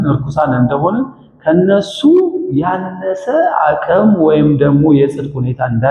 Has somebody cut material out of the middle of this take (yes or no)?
no